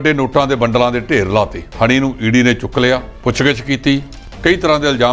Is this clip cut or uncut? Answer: cut